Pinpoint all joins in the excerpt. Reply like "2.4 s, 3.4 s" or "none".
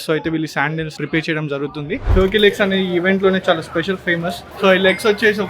1.0 s, 2.1 s, 4.4 s